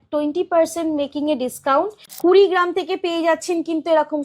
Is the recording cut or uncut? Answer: cut